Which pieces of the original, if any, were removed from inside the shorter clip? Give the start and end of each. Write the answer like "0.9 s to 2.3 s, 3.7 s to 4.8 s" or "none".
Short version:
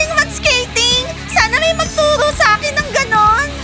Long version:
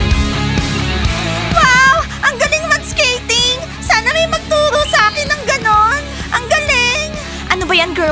none